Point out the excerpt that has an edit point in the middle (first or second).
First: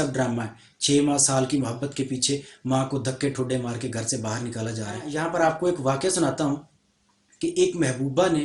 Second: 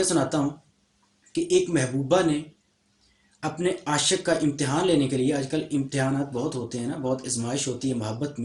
first